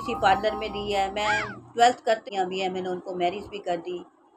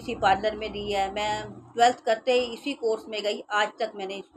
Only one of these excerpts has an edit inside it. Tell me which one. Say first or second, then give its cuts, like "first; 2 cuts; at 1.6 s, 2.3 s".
first; 1 cut; at 2.2 s